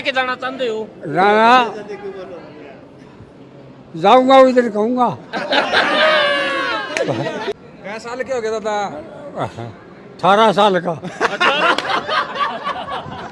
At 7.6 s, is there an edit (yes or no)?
yes